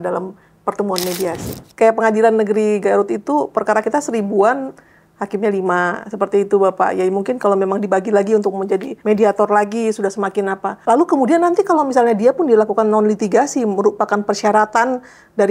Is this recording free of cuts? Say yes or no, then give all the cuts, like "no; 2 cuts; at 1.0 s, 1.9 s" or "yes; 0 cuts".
no; 1 cut; at 1.6 s